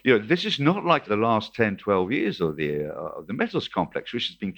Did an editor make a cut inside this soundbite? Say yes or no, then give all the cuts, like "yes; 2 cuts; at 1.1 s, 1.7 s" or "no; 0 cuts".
no; 0 cuts